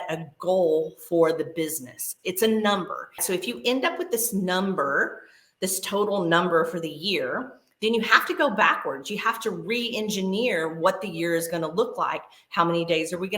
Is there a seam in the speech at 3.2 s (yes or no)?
yes